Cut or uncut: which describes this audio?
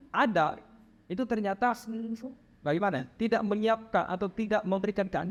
uncut